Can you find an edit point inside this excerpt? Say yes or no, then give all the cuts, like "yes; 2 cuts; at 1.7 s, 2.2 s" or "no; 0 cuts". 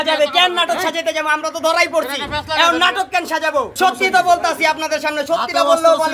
yes; 1 cut; at 3.7 s